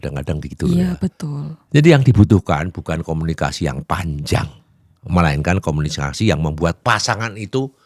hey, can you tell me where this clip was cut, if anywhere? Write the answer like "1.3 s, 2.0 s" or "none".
1.5 s